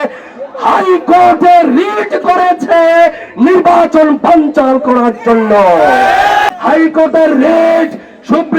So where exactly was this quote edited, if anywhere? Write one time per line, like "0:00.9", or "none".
0:06.4